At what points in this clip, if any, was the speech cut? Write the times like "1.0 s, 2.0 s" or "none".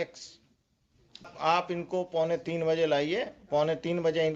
1.3 s